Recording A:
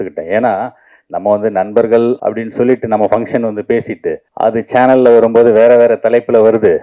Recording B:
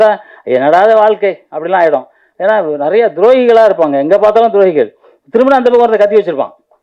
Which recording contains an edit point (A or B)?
A